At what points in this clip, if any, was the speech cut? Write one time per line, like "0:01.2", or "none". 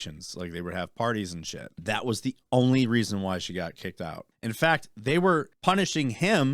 0:01.8
0:04.3
0:05.5

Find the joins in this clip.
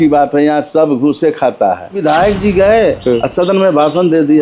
0:02.0

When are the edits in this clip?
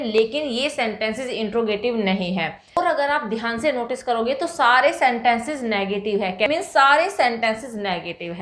0:02.8
0:06.5

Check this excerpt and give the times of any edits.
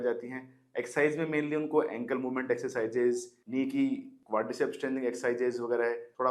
none

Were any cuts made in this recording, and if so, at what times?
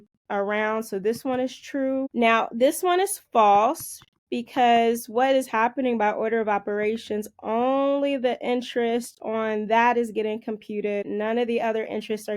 0:02.1
0:11.0

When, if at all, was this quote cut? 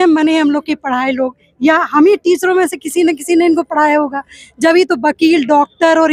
none

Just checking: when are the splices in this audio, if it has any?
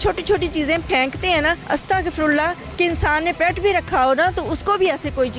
0:01.6

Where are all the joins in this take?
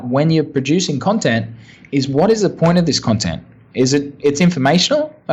none

